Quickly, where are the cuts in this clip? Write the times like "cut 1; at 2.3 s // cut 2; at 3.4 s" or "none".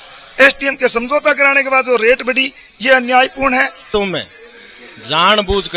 cut 1; at 3.9 s